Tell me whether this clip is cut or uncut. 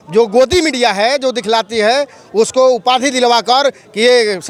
uncut